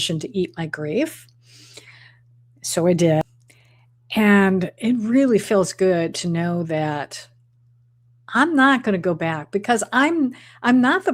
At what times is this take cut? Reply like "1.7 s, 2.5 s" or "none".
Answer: 3.2 s